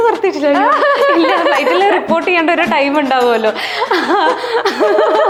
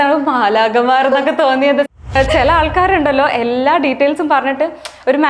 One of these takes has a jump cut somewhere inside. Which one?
second; 1 cut; at 2.1 s

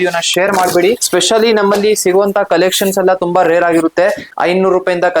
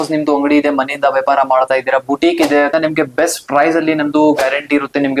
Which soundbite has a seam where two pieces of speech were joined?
first; 2 cuts; at 1.0 s, 4.3 s

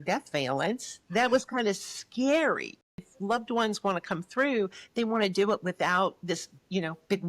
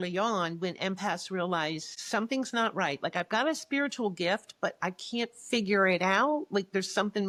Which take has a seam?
first; 1 cut; at 2.8 s

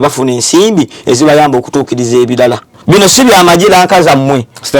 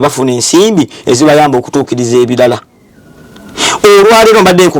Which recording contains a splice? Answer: first; 1 cut; at 2.7 s

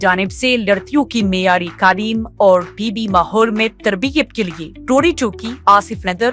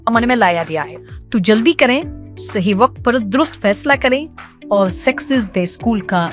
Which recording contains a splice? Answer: second; 1 cut; at 0.9 s

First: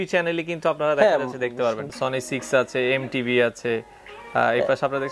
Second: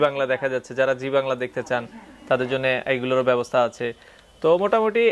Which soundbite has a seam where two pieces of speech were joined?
first; 1 cut; at 1.9 s

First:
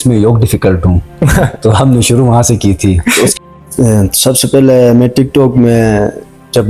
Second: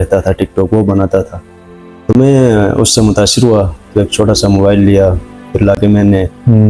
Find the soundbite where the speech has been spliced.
first; 1 cut; at 3.3 s

